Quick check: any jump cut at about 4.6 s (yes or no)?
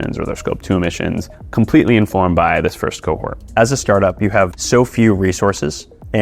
yes